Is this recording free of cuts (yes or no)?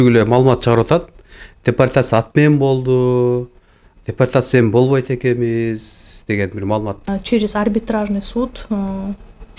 no